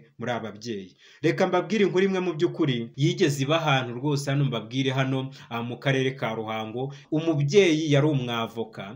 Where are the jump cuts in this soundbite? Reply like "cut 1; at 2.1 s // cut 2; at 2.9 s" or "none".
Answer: cut 1; at 2.9 s // cut 2; at 7.0 s

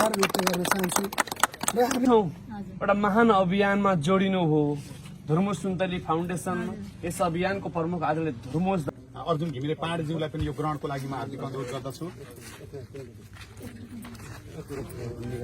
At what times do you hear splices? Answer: cut 1; at 2.1 s // cut 2; at 8.8 s

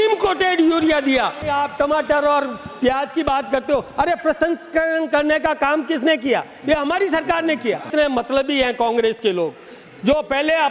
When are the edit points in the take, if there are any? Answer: cut 1; at 1.4 s // cut 2; at 7.9 s

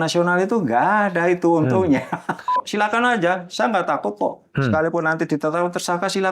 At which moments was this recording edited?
cut 1; at 2.6 s

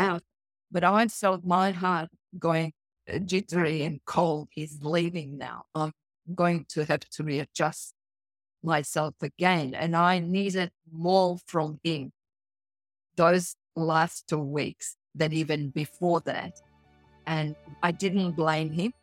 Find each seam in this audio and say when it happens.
cut 1; at 17.6 s

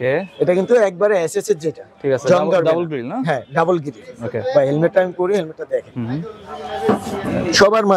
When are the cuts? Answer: none

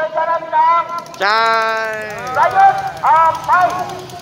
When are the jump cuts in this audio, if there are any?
none

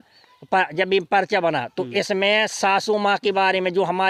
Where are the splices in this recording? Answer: none

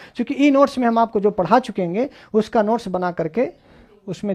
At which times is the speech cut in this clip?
none

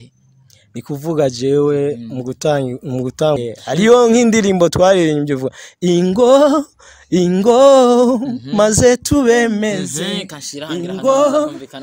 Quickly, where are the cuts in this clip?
cut 1; at 3.4 s

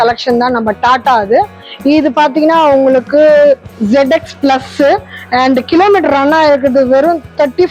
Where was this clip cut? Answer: none

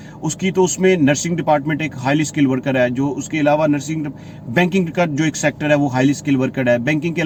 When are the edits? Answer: none

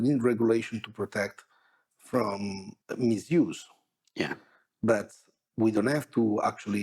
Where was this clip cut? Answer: cut 1; at 2.7 s

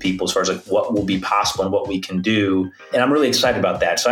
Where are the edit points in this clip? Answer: cut 1; at 2.9 s

